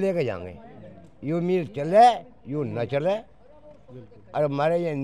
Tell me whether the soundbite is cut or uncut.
uncut